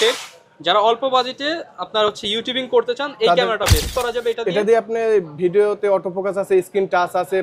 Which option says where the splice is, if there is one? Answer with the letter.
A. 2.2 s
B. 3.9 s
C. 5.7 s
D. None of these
B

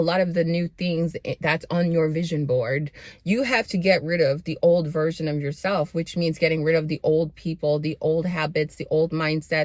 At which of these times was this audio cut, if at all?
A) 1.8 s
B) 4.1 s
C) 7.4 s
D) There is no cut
D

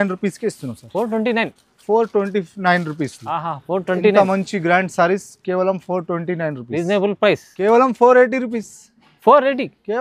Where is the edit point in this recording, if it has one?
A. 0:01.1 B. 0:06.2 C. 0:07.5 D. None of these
C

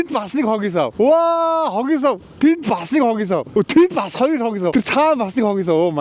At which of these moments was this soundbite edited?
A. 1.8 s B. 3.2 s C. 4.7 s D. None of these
C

